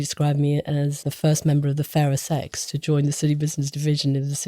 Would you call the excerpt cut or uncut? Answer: cut